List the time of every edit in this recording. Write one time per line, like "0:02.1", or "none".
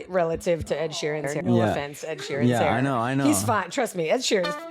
0:01.3